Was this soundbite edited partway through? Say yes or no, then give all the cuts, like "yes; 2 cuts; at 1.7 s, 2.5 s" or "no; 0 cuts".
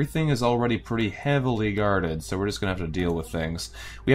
no; 0 cuts